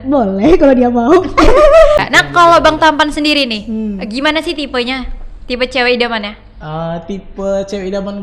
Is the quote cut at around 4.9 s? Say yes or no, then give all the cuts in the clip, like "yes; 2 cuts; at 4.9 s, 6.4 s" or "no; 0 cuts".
no; 1 cut; at 2.0 s